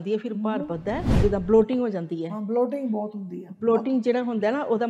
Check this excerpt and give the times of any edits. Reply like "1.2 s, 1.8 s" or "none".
1.1 s